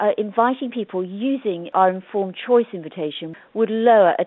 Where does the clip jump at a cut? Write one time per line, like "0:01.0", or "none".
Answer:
0:01.7